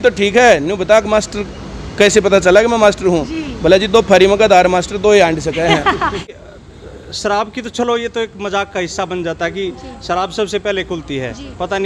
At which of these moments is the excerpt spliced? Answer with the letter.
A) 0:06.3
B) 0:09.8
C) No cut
A